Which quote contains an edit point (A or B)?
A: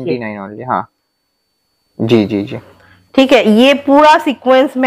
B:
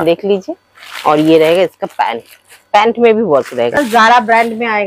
B